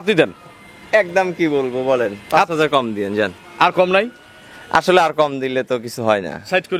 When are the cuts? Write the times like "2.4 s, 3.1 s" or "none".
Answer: 3.4 s

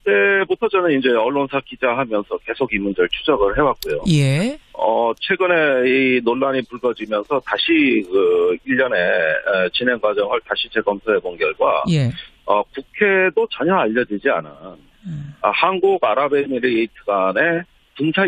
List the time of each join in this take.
4.5 s

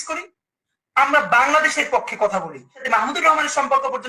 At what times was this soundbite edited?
2.8 s

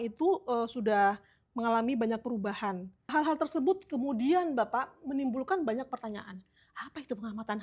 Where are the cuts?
3.1 s

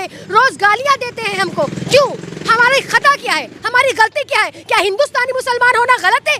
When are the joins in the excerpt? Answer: none

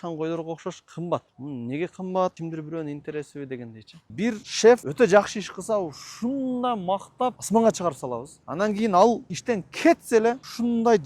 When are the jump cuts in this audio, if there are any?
1.3 s, 2.4 s, 4.1 s

